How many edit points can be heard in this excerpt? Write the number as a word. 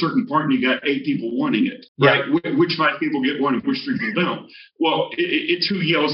one